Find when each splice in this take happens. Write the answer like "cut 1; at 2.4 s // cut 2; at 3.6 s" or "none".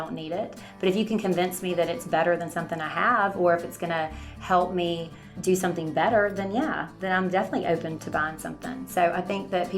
cut 1; at 5.3 s // cut 2; at 7.9 s